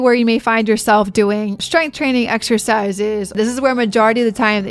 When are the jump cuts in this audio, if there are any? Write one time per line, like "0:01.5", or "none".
0:01.6
0:03.3